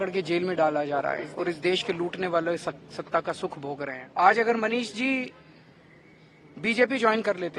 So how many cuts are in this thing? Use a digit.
2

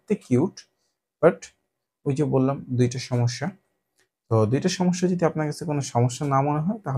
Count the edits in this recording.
0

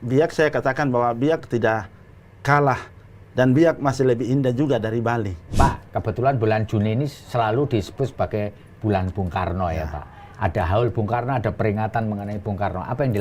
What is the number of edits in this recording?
1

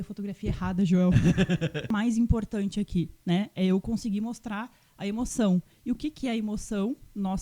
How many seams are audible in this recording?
1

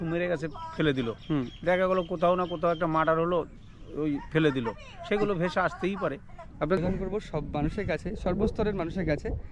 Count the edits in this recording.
1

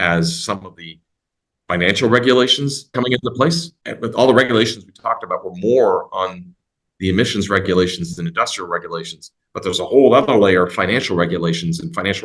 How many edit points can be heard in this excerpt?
2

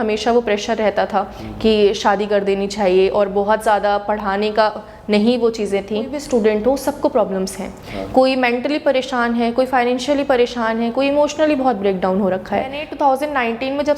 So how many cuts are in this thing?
2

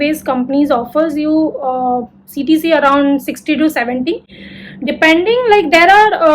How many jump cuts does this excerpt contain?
0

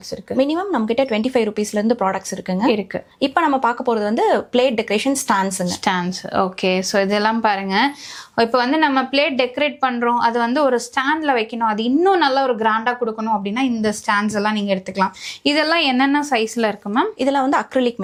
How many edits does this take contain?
0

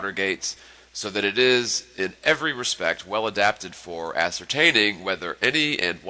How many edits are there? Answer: 0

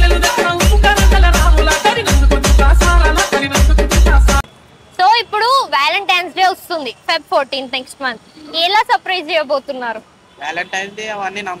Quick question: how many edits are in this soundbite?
1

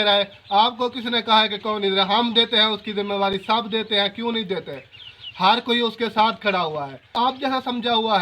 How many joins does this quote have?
1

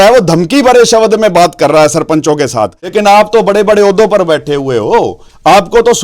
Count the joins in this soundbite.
1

